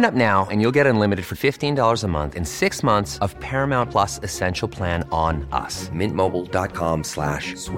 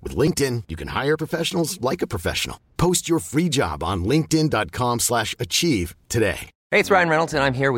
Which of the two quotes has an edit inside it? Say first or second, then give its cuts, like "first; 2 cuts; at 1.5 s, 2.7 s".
second; 1 cut; at 6.5 s